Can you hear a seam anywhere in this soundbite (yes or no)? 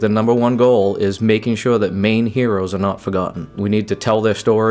yes